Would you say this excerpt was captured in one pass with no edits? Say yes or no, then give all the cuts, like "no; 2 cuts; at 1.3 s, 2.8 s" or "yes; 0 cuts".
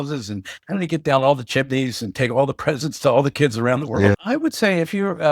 no; 1 cut; at 4.1 s